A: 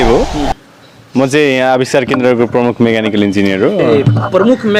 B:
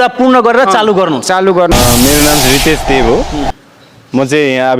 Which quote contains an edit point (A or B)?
B